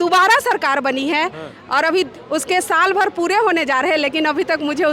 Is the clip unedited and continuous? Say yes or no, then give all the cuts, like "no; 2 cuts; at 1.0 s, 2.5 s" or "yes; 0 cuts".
yes; 0 cuts